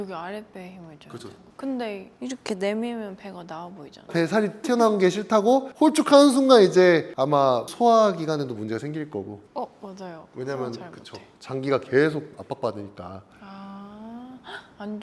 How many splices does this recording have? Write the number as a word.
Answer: one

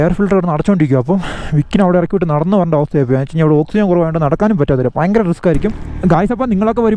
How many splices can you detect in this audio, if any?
one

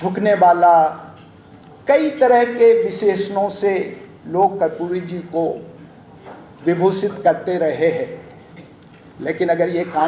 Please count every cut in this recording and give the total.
zero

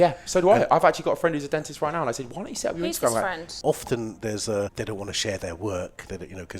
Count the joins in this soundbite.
two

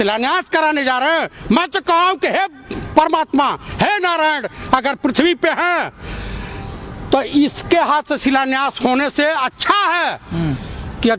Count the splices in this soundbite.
zero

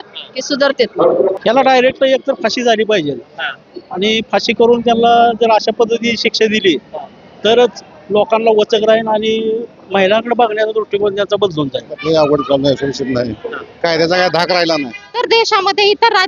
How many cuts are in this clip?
three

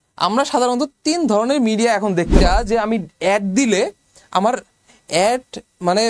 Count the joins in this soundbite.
one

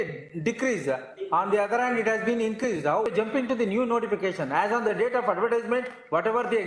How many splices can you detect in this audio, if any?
one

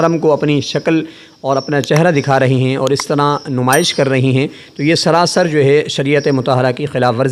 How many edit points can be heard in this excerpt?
zero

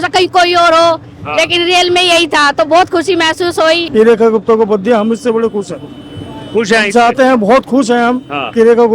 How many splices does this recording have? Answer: one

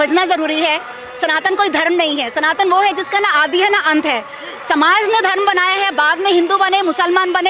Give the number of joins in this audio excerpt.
zero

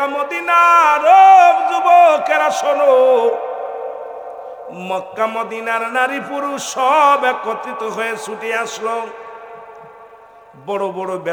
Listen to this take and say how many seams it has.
zero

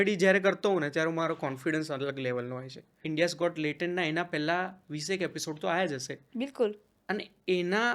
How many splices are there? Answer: one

